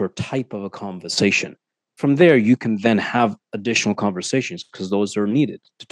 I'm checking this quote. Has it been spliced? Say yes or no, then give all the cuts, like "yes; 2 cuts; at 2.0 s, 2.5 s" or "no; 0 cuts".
no; 0 cuts